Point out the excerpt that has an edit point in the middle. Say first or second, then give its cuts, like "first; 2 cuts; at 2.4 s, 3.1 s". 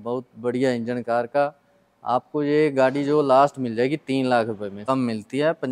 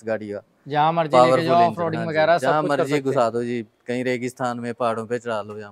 first; 1 cut; at 4.8 s